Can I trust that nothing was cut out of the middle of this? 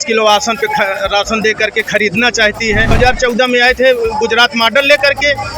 no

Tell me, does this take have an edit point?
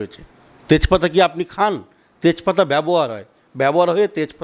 no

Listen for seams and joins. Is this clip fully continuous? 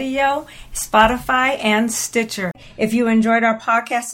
no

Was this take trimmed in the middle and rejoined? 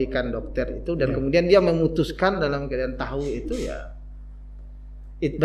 no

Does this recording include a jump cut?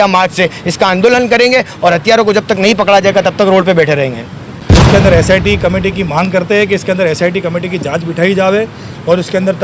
yes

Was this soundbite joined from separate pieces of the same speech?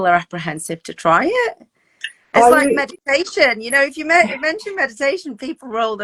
no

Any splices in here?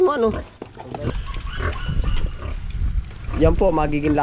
yes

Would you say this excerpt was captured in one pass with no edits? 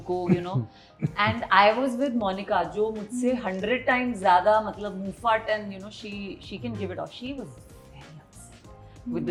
yes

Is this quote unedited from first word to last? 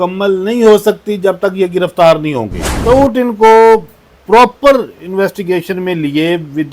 no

